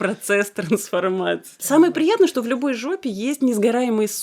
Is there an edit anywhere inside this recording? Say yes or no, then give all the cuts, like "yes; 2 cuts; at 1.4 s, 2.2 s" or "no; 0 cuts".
yes; 1 cut; at 1.6 s